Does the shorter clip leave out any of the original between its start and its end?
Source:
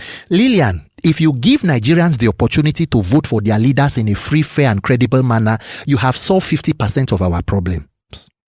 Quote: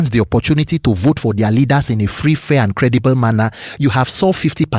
no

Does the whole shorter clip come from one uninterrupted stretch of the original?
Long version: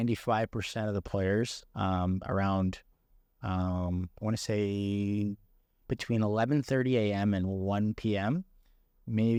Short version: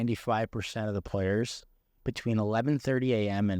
no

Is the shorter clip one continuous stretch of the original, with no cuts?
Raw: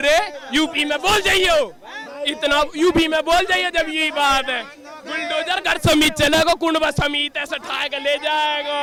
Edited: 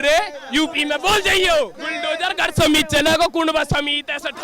no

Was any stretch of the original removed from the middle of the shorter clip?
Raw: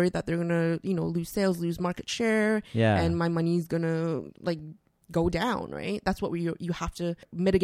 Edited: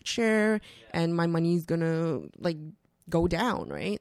no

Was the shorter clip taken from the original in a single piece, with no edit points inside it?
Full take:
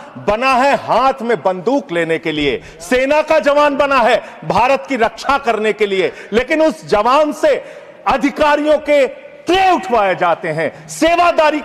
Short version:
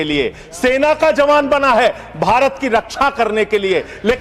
yes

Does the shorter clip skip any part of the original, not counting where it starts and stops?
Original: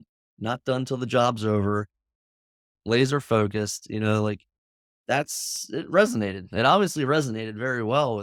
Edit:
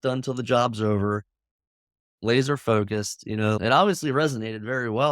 yes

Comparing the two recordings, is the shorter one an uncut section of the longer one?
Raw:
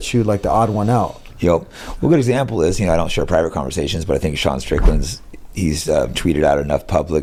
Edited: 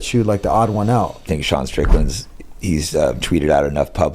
no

